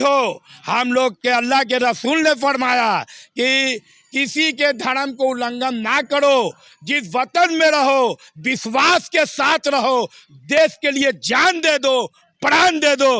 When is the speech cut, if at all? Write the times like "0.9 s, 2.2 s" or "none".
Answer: none